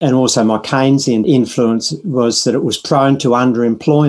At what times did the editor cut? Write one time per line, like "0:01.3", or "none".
0:01.2